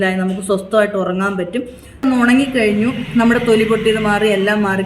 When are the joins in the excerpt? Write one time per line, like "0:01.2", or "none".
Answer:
0:02.0